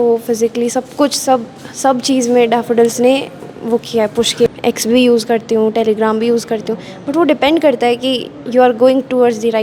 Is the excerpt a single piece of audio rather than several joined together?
no; 1 cut; at 4.5 s

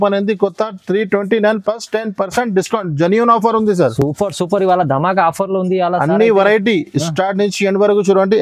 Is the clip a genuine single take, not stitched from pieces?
yes; 0 cuts

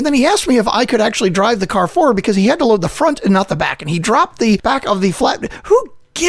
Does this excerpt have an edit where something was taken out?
yes; 1 cut; at 4.6 s

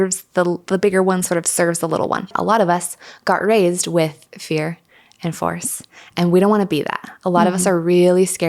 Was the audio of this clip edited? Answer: yes; 1 cut; at 2.3 s

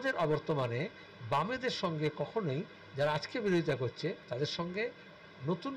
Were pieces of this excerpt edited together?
yes; 1 cut; at 4.2 s

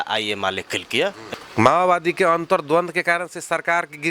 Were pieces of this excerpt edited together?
yes; 1 cut; at 1.2 s

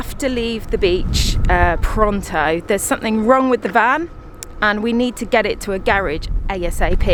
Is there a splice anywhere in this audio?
no; 0 cuts

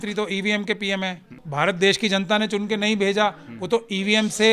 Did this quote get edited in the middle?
yes; 1 cut; at 1.4 s

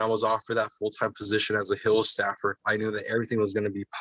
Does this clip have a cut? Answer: yes; 1 cut; at 2.6 s

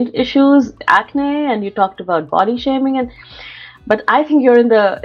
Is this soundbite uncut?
yes; 0 cuts

